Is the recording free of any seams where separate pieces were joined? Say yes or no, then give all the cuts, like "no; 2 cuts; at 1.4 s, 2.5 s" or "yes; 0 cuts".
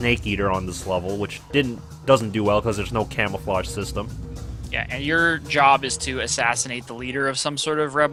yes; 0 cuts